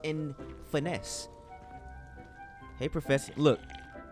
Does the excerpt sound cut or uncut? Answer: uncut